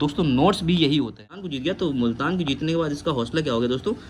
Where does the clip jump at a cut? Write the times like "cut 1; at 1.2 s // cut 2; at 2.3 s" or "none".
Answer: cut 1; at 1.5 s